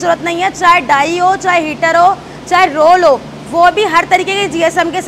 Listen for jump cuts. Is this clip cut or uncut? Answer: uncut